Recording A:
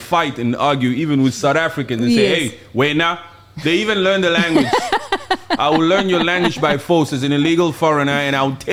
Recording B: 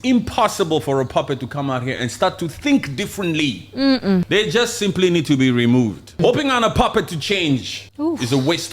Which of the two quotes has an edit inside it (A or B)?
B